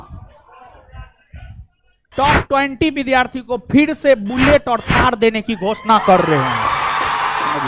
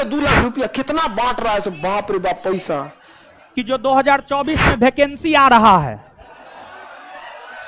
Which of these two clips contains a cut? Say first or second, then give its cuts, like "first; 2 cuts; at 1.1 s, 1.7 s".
second; 1 cut; at 3.5 s